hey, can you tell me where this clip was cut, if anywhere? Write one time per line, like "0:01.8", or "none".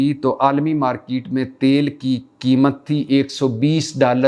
none